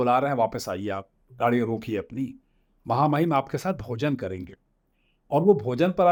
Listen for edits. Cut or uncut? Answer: uncut